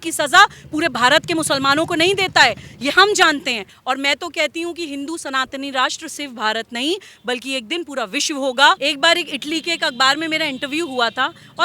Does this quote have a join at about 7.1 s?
no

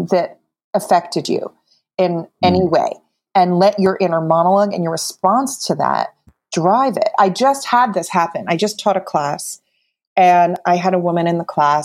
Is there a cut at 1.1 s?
no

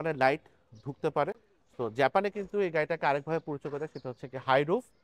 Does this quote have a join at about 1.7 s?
yes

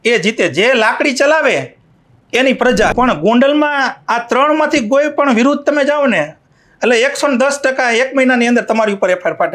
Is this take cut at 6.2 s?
no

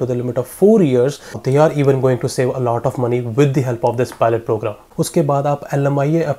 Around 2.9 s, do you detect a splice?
no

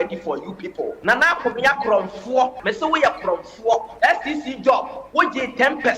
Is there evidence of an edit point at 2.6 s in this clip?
yes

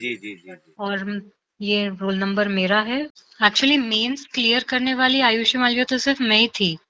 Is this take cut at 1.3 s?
no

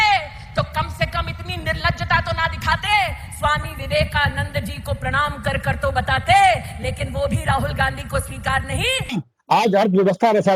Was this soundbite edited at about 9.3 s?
yes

